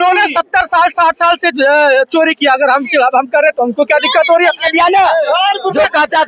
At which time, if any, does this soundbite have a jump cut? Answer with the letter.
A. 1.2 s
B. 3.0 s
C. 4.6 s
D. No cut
C